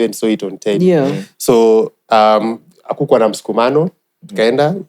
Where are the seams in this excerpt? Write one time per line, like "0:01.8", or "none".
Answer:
none